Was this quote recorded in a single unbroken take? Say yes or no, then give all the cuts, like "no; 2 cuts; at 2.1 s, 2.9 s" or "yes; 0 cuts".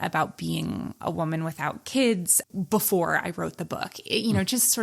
yes; 0 cuts